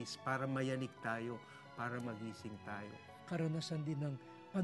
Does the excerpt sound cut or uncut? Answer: cut